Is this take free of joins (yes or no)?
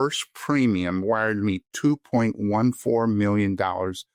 yes